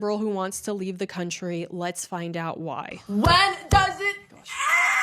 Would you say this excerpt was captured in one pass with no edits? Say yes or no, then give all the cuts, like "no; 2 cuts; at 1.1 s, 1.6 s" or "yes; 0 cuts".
no; 1 cut; at 3.0 s